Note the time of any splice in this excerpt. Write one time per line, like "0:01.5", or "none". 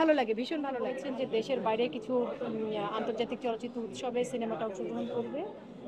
0:00.9